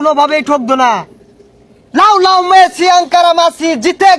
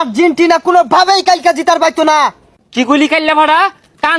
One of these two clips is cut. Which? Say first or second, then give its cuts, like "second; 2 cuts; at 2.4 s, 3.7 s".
second; 1 cut; at 2.5 s